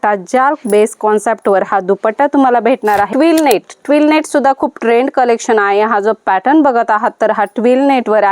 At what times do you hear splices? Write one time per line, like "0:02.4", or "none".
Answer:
0:03.1